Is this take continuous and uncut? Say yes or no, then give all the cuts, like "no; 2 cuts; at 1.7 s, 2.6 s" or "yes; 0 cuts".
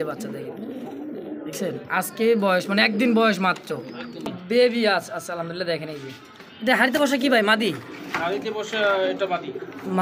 no; 1 cut; at 4.4 s